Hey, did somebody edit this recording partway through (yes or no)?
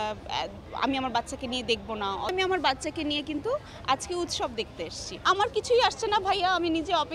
yes